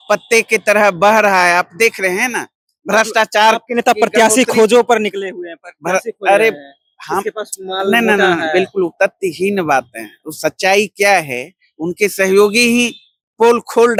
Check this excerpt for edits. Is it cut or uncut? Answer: uncut